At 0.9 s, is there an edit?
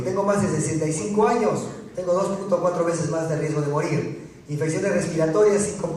no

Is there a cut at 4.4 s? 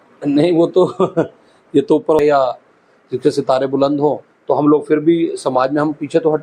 no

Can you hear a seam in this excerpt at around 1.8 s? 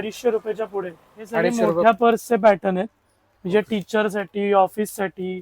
yes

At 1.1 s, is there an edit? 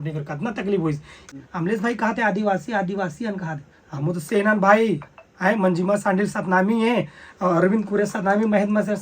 yes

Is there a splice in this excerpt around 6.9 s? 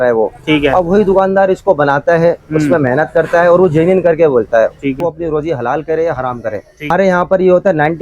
yes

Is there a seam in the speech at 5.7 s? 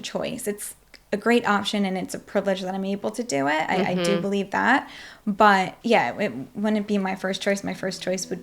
yes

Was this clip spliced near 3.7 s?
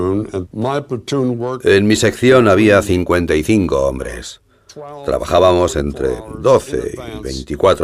no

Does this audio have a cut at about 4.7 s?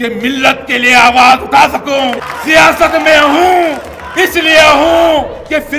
no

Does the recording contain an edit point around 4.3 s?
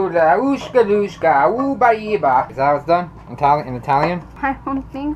yes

